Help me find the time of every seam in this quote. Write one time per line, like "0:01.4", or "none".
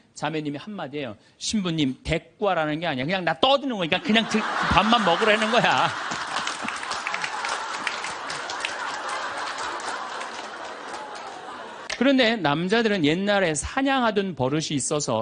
0:11.7